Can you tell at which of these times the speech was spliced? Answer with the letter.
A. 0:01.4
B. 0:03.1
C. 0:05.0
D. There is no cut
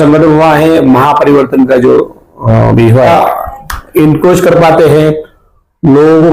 B